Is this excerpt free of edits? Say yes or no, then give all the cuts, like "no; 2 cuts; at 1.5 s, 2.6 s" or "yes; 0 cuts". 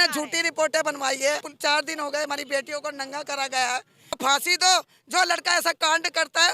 no; 2 cuts; at 1.5 s, 4.2 s